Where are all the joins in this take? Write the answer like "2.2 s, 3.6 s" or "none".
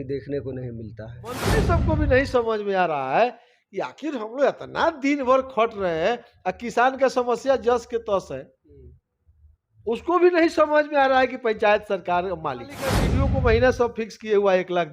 1.5 s, 13.1 s

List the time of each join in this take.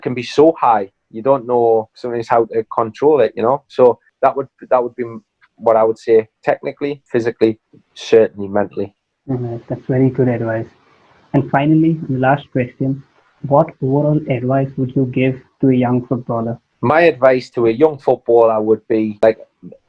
none

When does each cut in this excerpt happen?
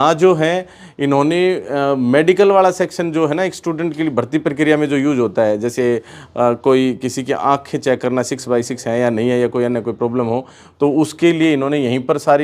none

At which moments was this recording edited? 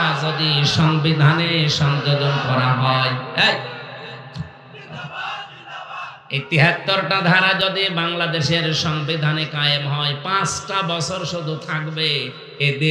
none

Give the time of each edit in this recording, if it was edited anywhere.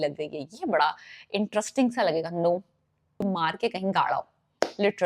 3.2 s

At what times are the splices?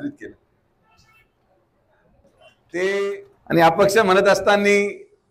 3.3 s

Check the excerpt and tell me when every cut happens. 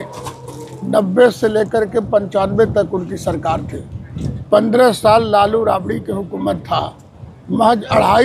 none

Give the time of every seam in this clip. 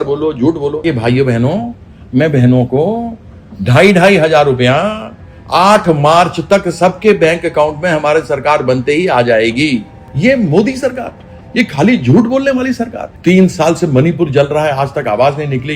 0.8 s, 10.0 s, 13.0 s

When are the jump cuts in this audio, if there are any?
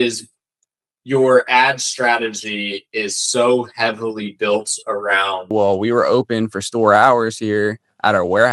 5.5 s

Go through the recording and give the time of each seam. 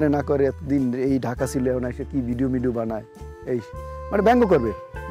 none

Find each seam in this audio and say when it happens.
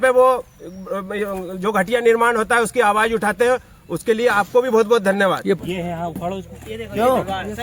5.6 s

